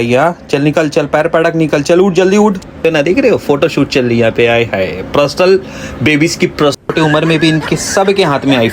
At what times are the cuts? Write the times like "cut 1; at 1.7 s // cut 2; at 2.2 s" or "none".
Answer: cut 1; at 2.8 s // cut 2; at 6.9 s